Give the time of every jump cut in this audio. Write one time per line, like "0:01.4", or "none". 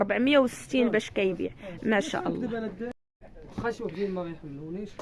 0:03.0